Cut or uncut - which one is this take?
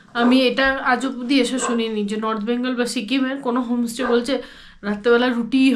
uncut